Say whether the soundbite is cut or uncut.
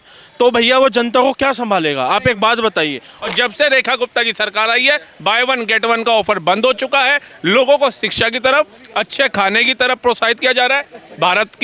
cut